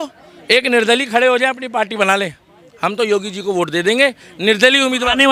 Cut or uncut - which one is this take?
uncut